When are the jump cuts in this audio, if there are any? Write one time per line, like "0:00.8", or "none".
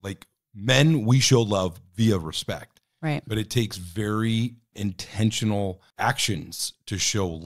0:04.7
0:05.9